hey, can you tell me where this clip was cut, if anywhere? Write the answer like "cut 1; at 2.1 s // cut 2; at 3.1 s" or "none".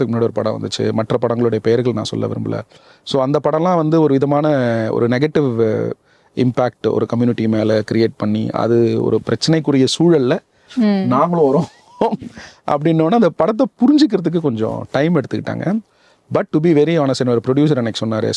none